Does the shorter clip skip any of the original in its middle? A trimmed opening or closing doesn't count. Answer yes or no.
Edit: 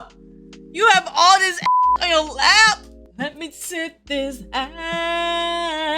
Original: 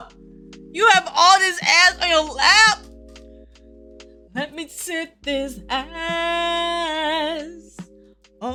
yes